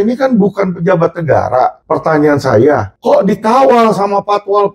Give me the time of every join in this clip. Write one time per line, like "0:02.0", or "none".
0:01.8
0:02.9